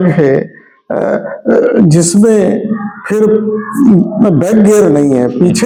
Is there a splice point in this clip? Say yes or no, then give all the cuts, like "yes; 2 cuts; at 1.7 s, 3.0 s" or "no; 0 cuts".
no; 0 cuts